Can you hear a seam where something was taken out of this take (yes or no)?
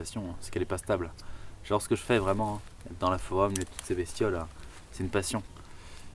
no